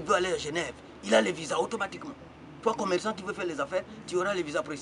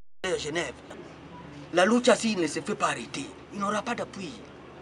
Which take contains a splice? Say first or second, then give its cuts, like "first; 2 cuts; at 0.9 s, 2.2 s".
second; 1 cut; at 0.9 s